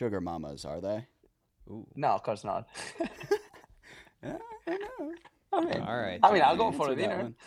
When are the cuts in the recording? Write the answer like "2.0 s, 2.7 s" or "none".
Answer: none